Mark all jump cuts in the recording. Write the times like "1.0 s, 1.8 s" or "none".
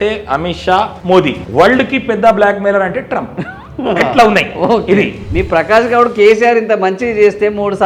1.4 s, 5.2 s